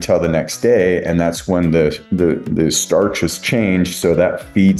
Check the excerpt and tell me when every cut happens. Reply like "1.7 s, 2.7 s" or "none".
none